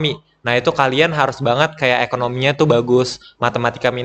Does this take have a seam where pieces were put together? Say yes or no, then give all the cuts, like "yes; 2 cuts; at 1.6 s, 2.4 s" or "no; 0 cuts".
no; 0 cuts